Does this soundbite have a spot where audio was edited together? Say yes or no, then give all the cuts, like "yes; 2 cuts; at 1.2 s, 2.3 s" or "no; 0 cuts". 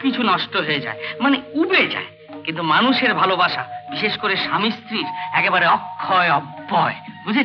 no; 0 cuts